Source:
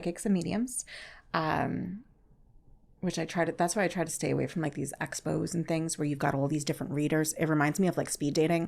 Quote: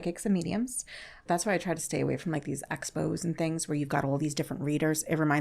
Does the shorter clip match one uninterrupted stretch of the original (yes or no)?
no